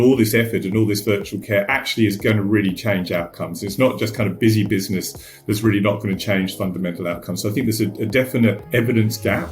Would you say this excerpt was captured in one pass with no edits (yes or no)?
no